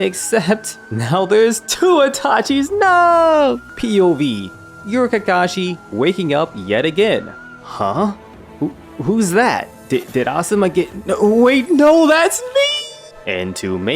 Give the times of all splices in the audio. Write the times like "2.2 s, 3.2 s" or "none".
3.6 s, 13.1 s